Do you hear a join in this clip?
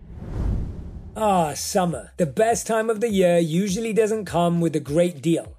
yes; 1 cut; at 1.0 s

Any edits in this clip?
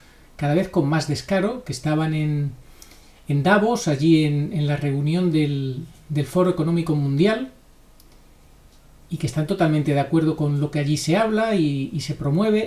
no; 0 cuts

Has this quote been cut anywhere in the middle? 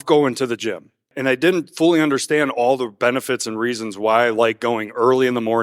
yes; 1 cut; at 1.1 s

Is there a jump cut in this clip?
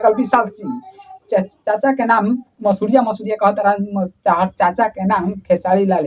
no; 0 cuts

